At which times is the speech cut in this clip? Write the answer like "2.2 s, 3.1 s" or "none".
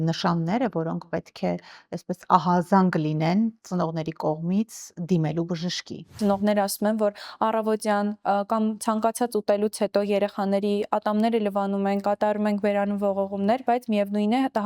6.2 s